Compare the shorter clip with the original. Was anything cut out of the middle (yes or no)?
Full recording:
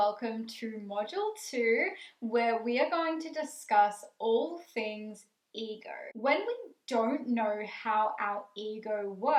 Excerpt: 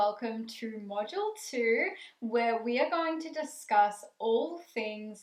no